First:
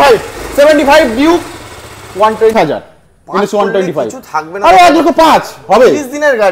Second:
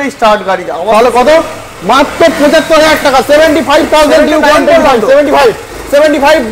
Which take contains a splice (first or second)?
first